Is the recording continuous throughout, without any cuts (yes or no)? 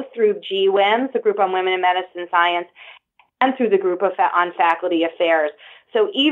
yes